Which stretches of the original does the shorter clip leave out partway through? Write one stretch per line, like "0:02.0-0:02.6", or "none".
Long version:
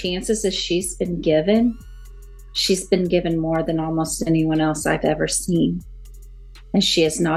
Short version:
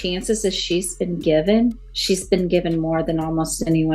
0:01.9-0:02.5

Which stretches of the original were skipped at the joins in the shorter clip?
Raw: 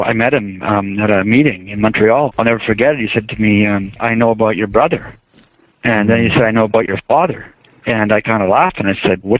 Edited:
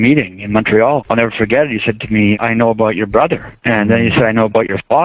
0:03.7-0:04.0
0:05.1-0:05.7

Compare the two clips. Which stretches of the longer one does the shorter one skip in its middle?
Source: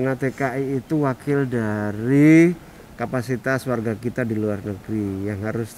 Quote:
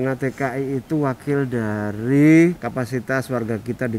0:02.6-0:03.0

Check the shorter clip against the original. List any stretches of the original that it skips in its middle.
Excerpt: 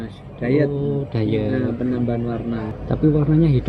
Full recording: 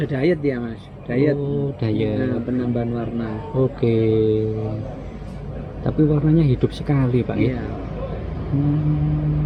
0:03.4-0:05.7

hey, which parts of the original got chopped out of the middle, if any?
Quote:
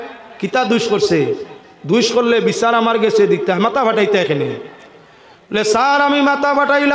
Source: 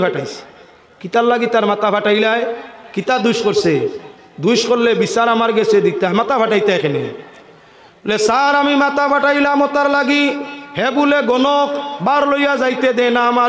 none

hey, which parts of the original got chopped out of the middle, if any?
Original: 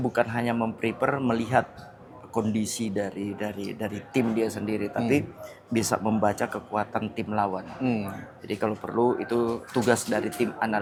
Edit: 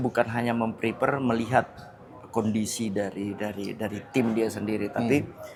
none

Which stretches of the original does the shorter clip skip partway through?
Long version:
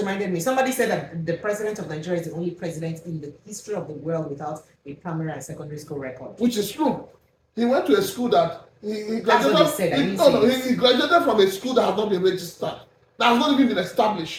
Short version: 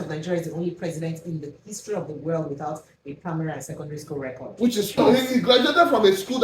0:06.8-0:10.4

